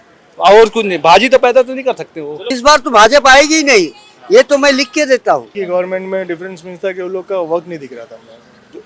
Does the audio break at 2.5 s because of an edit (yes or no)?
yes